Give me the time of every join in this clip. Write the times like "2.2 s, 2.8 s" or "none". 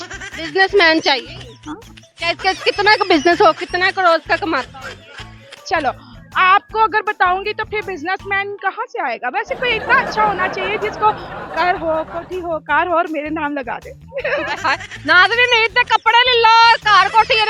none